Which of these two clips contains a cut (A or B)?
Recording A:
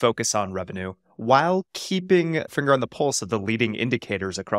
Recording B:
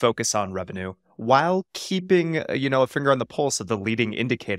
A